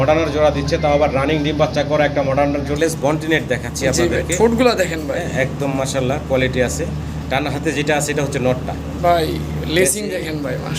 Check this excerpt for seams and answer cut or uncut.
cut